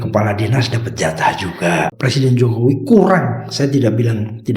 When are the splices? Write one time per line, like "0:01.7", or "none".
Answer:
0:01.9